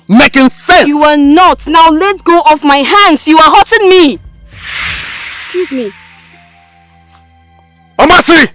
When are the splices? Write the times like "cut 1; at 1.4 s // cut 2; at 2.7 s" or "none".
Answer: none